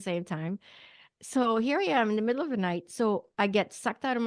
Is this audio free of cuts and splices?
yes; 0 cuts

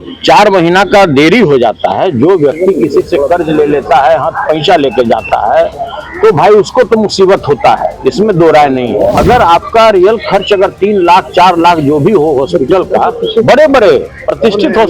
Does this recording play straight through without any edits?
no; 1 cut; at 9.2 s

